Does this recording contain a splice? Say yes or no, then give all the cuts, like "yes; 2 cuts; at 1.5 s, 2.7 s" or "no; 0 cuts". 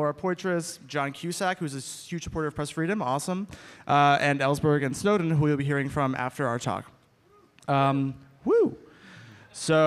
yes; 1 cut; at 7.0 s